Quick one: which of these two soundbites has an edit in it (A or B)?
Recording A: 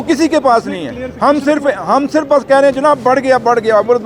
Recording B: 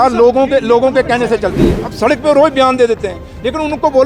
B